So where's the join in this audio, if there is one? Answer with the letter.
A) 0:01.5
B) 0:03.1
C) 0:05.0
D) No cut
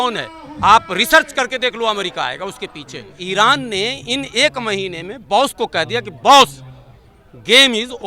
B